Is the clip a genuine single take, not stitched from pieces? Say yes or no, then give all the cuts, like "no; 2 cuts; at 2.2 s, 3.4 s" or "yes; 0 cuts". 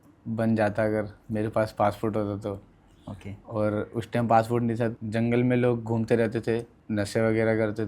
no; 2 cuts; at 4.9 s, 6.8 s